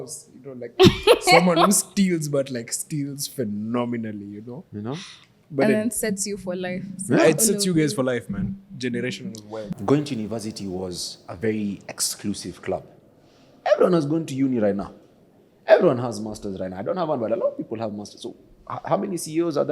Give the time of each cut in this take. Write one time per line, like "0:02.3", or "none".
0:09.7